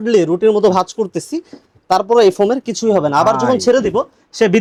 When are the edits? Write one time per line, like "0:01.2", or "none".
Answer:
none